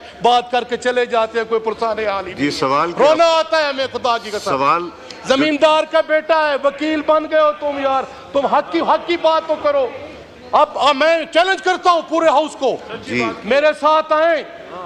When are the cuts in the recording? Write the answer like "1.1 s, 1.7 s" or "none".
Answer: none